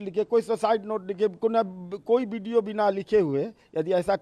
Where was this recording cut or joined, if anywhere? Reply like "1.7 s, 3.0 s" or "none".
none

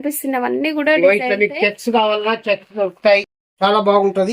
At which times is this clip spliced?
3.3 s

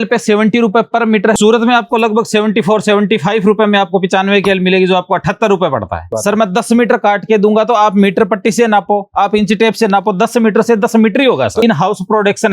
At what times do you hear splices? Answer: 1.4 s, 6.1 s, 11.6 s

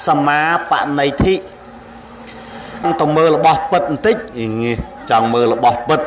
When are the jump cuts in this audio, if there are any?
2.8 s

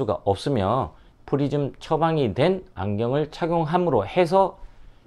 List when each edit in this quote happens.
1.1 s

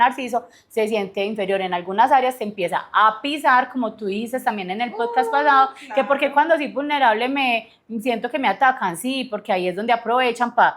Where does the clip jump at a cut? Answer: none

